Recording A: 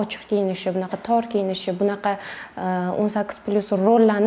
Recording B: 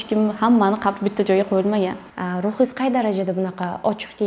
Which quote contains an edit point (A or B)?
B